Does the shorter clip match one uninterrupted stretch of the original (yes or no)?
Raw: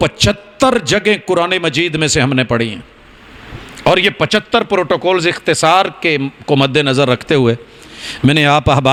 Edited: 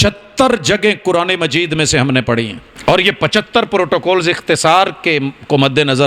no